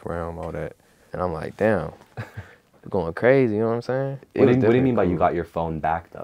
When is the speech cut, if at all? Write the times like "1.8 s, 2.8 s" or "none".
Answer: 4.2 s